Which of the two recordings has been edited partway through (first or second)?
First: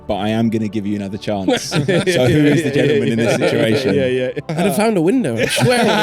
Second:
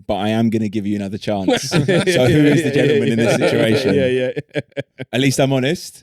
first